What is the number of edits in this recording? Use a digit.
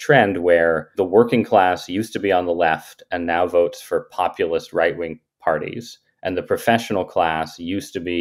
1